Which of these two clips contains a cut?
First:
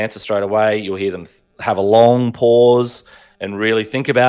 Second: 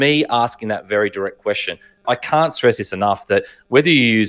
second; 1 cut; at 2.0 s

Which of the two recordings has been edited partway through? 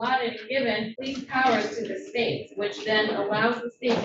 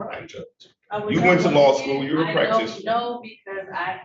first; 1 cut; at 1.0 s

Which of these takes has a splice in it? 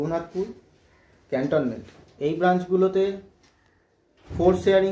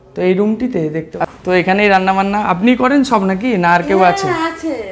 second; 1 cut; at 1.1 s

